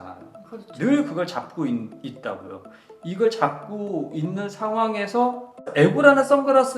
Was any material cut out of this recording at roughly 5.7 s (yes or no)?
yes